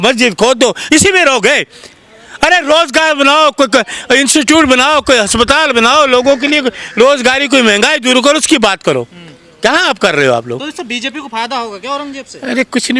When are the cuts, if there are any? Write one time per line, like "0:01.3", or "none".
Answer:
none